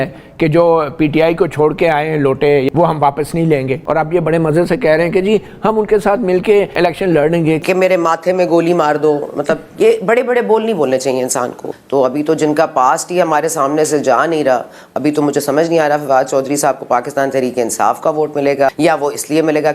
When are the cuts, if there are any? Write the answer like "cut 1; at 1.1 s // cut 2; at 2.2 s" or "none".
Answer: cut 1; at 2.7 s // cut 2; at 3.8 s // cut 3; at 6.7 s // cut 4; at 7.6 s // cut 5; at 11.6 s // cut 6; at 18.7 s